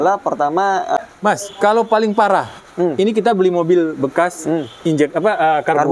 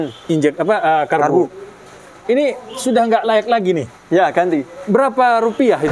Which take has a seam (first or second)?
first